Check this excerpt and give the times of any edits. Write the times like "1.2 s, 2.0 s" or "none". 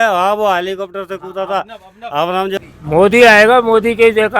2.7 s